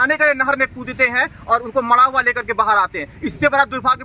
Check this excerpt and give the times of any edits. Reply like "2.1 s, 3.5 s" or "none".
none

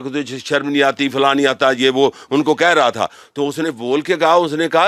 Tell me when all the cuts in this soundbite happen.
none

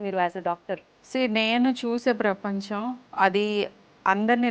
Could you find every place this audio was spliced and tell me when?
0.9 s, 3.1 s

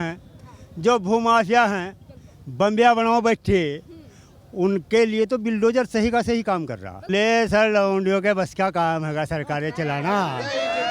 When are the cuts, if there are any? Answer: 6.9 s

